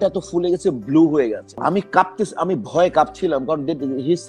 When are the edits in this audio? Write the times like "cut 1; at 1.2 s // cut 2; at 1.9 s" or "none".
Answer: cut 1; at 1.6 s